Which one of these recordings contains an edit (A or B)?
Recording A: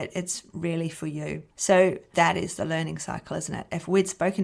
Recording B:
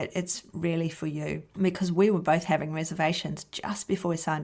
A